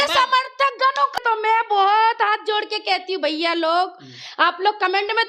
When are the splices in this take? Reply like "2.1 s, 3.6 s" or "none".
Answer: 1.1 s